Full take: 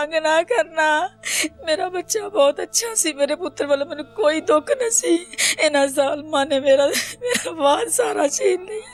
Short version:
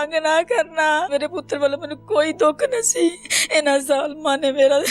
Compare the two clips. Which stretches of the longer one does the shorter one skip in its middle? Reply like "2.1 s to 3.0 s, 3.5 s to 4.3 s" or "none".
1.1 s to 3.2 s